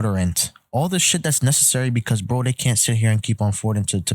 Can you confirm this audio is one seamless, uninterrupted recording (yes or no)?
yes